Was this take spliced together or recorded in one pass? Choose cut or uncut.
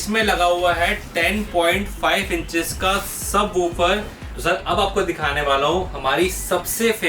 cut